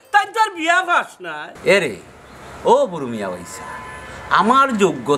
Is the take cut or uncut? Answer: cut